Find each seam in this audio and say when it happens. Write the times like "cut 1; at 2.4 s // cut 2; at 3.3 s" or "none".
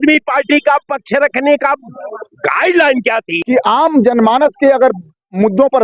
cut 1; at 3.3 s